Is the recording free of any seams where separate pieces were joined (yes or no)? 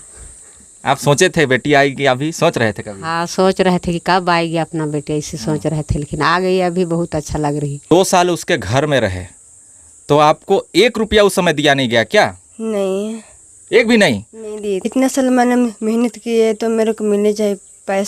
no